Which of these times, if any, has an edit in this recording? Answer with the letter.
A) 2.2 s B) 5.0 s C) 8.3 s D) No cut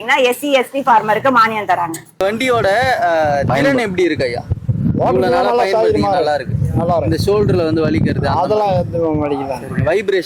A